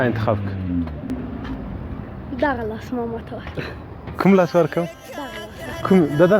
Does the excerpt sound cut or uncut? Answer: cut